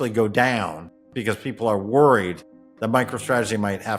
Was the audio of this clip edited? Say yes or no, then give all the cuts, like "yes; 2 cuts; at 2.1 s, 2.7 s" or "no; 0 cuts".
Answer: no; 0 cuts